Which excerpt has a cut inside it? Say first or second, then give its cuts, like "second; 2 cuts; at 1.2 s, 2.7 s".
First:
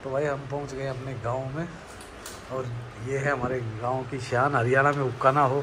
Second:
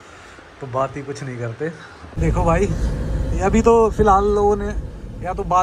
second; 1 cut; at 2.2 s